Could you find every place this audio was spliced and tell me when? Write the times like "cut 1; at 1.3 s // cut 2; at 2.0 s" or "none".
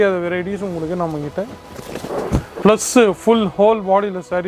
cut 1; at 2.5 s